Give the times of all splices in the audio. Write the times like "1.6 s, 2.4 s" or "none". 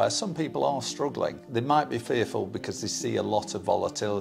1.4 s